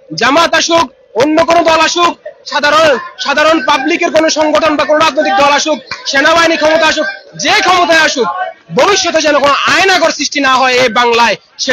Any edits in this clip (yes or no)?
no